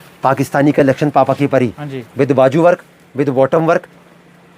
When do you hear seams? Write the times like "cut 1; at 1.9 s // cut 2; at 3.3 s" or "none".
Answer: none